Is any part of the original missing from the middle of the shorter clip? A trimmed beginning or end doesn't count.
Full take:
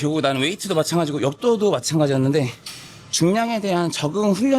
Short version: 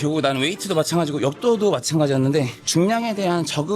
yes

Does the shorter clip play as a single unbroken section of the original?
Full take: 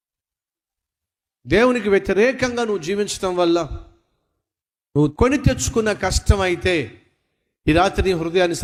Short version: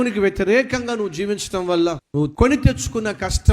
no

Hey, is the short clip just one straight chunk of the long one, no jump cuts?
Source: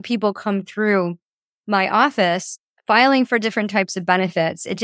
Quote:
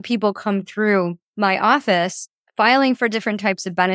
no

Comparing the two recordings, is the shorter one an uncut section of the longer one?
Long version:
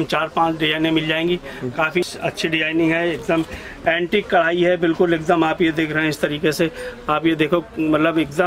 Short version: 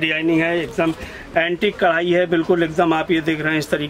yes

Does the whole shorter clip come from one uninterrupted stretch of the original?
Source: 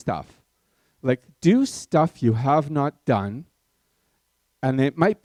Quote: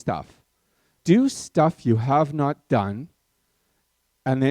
no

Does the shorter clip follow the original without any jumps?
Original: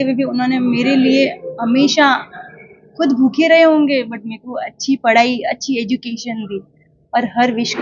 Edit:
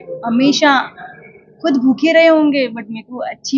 yes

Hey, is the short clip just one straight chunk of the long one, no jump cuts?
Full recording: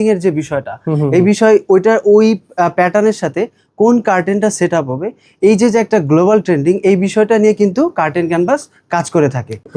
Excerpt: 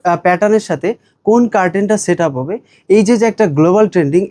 yes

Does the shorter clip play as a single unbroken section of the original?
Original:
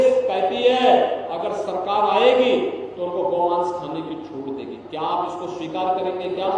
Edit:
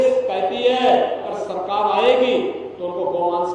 no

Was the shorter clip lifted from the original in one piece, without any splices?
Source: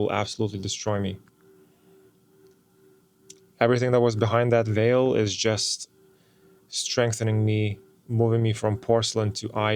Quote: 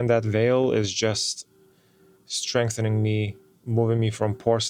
yes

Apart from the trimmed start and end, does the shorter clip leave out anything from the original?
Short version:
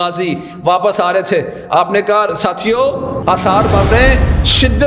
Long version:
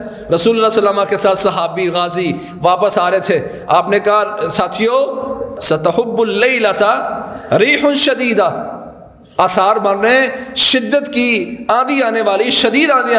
yes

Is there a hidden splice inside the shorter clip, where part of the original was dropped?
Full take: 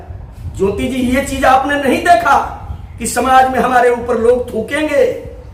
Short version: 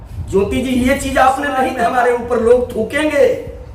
yes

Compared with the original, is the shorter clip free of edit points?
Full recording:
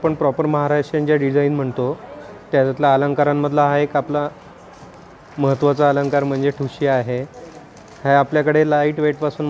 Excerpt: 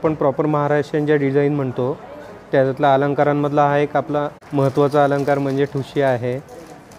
no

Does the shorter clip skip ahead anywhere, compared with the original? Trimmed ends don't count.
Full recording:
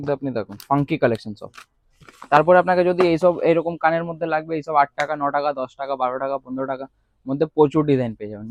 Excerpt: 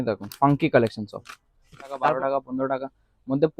yes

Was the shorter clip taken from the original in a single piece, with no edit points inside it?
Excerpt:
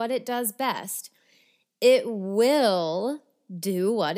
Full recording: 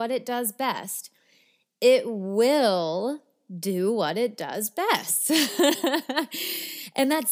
yes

